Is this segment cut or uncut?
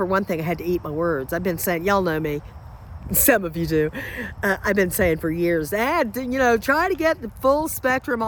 uncut